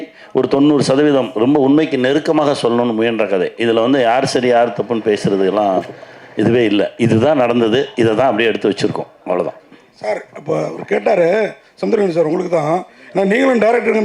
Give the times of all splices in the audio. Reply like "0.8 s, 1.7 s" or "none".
none